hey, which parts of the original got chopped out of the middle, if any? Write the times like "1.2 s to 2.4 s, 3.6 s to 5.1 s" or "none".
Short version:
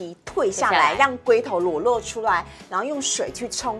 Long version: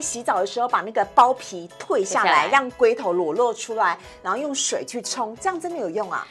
none